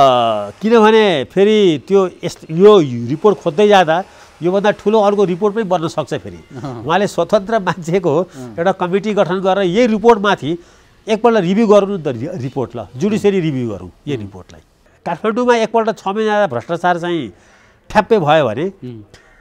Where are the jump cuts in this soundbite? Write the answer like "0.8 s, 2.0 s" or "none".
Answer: 14.9 s